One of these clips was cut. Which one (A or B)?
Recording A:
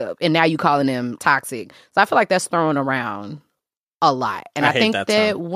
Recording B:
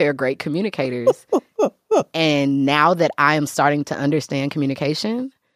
A